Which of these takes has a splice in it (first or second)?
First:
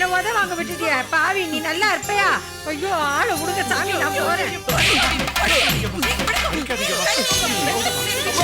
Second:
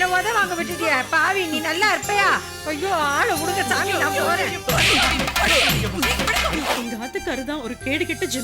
second